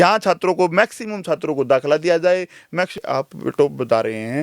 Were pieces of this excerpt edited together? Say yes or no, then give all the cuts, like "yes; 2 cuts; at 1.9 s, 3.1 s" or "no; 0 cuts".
yes; 1 cut; at 3.0 s